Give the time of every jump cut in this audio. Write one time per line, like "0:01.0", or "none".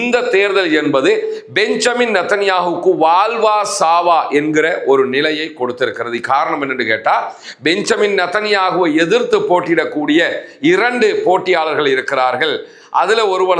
none